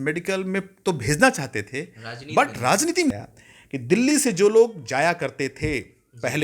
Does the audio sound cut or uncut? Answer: cut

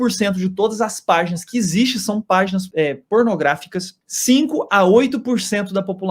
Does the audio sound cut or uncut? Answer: uncut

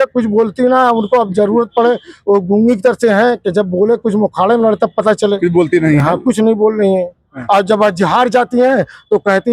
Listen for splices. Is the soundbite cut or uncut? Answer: uncut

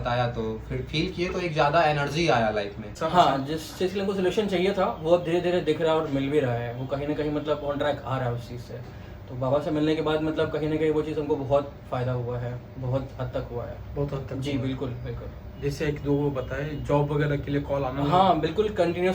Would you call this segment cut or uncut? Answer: cut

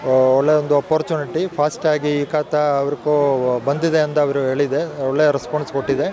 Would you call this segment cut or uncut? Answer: uncut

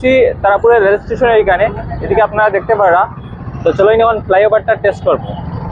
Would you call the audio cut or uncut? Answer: uncut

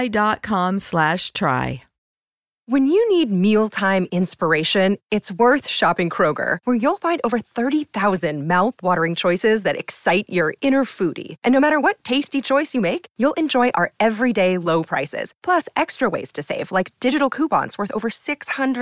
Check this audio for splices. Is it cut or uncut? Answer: cut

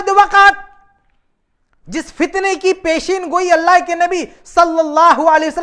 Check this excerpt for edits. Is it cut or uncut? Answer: uncut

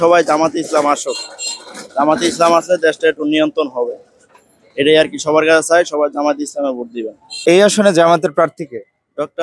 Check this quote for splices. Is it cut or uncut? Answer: cut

